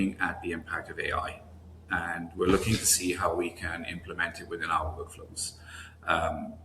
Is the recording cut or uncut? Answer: uncut